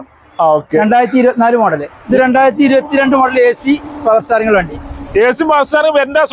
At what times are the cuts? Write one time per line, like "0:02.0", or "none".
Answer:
0:01.9